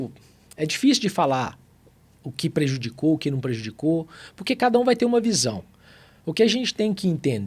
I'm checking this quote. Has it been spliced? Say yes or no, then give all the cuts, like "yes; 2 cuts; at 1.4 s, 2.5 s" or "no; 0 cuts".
no; 0 cuts